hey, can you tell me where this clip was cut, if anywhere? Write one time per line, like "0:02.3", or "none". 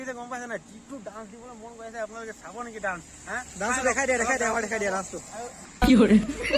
0:05.6